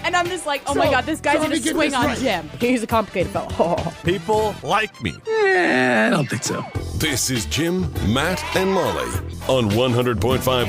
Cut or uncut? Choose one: uncut